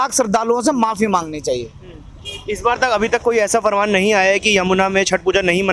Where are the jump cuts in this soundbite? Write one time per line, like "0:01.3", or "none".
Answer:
none

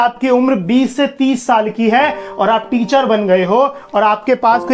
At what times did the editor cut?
none

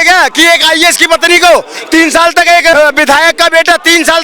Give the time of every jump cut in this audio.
0:02.7

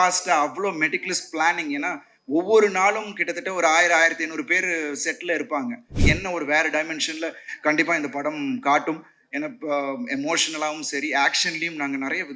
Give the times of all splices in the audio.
0:05.9

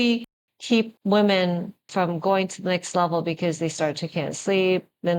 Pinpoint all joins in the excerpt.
0:01.0
0:01.8

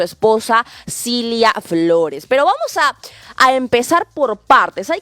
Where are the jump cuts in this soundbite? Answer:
none

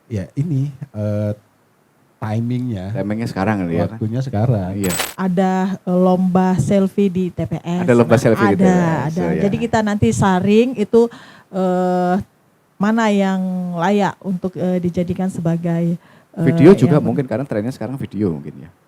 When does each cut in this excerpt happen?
0:05.1

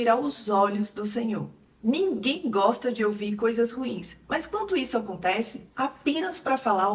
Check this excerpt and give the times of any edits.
0:01.6
0:05.6

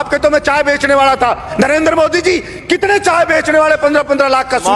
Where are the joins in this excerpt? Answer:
0:01.5

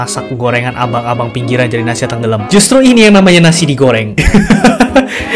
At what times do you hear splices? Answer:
0:02.4
0:04.1

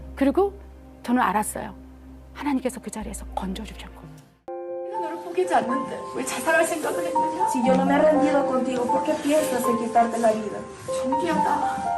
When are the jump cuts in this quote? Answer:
0:04.5

